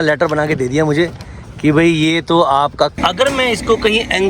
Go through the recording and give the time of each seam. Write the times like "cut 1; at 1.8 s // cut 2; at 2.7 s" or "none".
cut 1; at 2.9 s